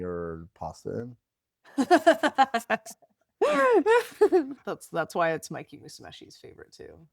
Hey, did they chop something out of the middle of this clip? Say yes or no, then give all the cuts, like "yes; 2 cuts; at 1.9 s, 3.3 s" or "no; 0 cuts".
yes; 1 cut; at 4.6 s